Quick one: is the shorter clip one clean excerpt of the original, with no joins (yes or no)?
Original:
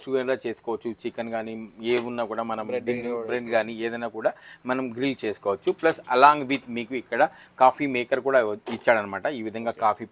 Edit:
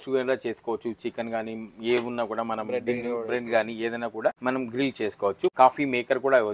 no